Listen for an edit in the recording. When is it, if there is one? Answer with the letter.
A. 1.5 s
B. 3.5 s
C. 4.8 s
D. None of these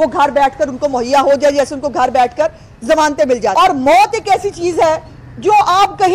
B